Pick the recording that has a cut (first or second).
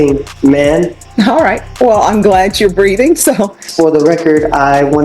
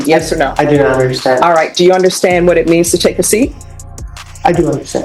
first